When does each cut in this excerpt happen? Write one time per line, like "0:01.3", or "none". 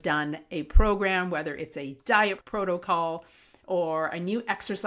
0:02.4